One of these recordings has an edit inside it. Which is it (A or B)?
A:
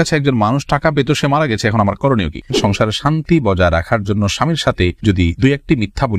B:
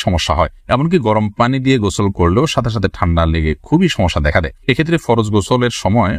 A